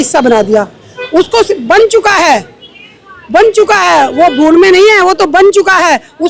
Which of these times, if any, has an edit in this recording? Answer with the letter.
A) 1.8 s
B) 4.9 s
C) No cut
C